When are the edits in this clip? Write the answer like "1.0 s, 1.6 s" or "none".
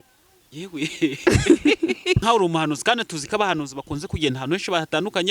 2.2 s